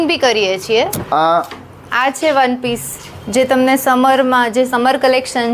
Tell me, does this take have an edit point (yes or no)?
yes